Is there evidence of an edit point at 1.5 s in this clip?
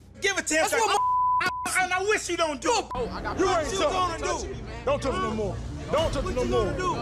no; 1 cut; at 2.9 s

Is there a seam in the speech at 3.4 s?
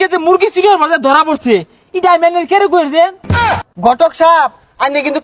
yes; 1 cut; at 3.4 s

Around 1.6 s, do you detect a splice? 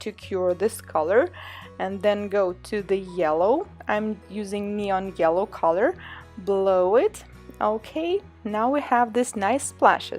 no; 1 cut; at 3.8 s

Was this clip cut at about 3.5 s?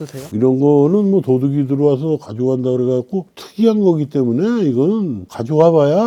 no; 0 cuts

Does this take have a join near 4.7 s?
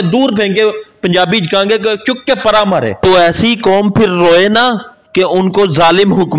no; 1 cut; at 3.0 s

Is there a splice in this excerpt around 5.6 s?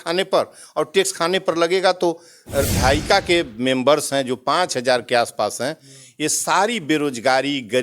no; 1 cut; at 2.8 s

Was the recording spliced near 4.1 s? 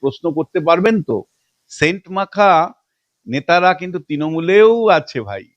no; 1 cut; at 1.4 s

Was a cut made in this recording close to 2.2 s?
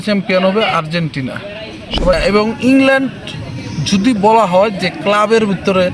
yes; 1 cut; at 2.2 s

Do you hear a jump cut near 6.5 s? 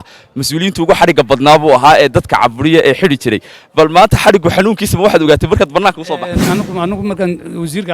yes; 1 cut; at 6.5 s

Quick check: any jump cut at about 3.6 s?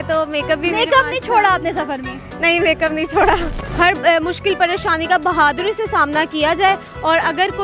yes; 1 cut; at 3.6 s

